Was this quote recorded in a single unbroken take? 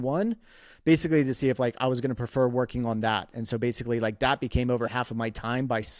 yes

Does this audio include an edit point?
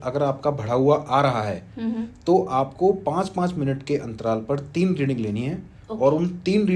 no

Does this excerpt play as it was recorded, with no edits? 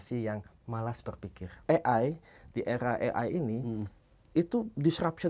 no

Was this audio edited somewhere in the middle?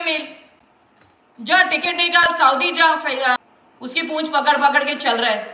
yes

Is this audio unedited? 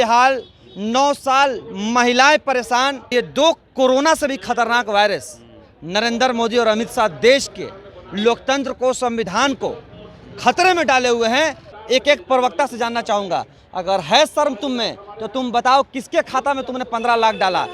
no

